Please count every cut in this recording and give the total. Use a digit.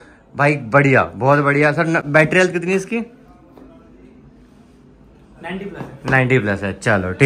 0